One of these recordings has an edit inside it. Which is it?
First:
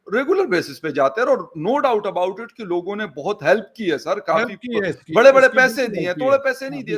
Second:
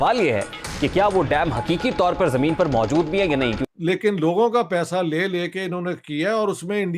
second; 1 cut; at 3.6 s

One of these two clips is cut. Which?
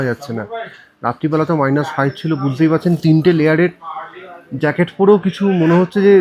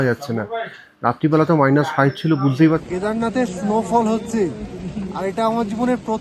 second; 1 cut; at 2.8 s

